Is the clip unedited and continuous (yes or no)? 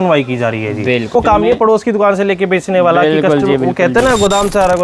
no